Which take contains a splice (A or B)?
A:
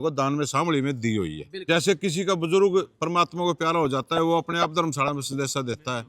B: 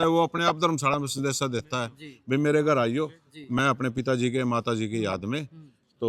A